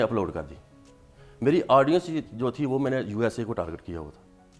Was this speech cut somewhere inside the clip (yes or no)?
no